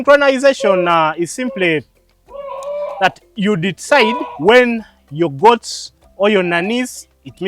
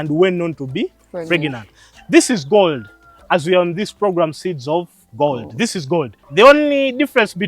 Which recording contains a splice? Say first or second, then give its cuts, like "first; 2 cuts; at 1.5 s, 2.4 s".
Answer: second; 2 cuts; at 1.9 s, 6.2 s